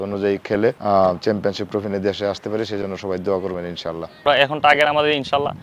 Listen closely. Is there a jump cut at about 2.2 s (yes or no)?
no